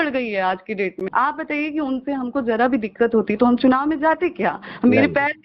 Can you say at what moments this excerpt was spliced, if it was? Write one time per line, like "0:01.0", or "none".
0:01.0